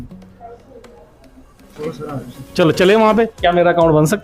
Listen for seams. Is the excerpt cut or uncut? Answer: cut